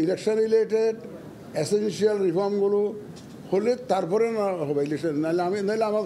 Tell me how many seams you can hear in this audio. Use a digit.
0